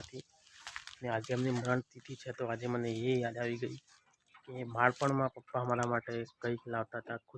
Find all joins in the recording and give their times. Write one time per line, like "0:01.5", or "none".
none